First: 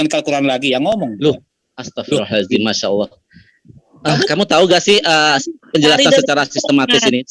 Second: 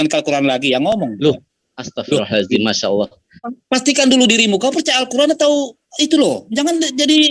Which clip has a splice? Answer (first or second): second